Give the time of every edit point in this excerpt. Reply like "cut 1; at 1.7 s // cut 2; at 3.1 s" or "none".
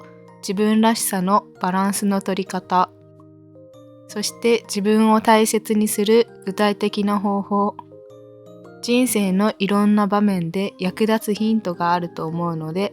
none